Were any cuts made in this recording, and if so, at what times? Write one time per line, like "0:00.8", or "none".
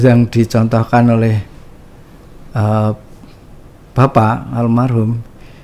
none